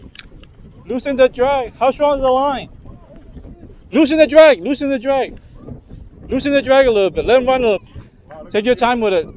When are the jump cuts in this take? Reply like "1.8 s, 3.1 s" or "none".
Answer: 7.8 s